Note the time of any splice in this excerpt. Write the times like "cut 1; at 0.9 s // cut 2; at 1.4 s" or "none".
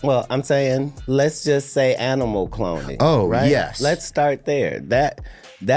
cut 1; at 1.0 s